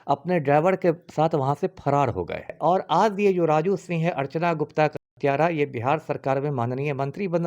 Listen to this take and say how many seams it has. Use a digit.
1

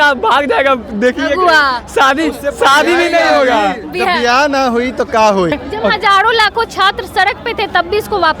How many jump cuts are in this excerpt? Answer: 1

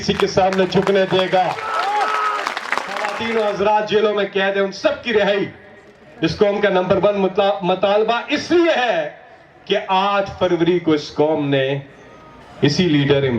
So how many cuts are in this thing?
1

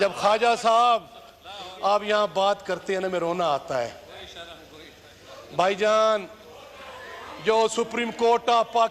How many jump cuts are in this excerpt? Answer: 0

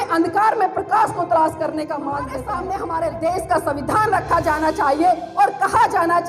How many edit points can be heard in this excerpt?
1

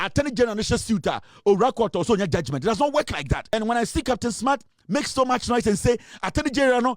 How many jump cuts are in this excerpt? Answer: 1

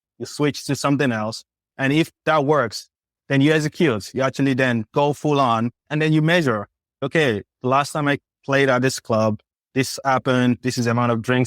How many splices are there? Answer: 3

